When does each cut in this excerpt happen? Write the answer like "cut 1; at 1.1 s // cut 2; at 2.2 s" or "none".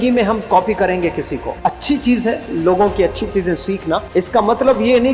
cut 1; at 1.4 s // cut 2; at 4.1 s